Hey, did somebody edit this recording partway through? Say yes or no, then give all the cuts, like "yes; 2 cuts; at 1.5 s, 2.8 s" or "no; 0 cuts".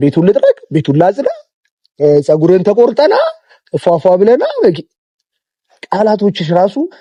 no; 0 cuts